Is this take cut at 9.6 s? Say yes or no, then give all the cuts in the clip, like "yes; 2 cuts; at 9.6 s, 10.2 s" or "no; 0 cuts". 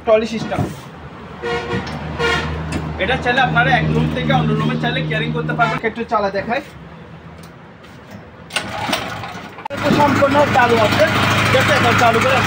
yes; 2 cuts; at 5.8 s, 9.6 s